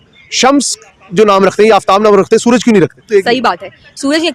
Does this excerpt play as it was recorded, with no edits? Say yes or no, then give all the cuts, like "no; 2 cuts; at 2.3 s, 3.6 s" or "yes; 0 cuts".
no; 1 cut; at 3.1 s